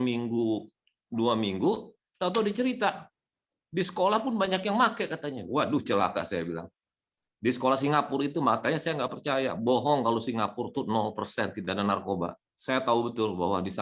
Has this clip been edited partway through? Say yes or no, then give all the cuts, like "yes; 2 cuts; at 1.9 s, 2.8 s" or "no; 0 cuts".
no; 0 cuts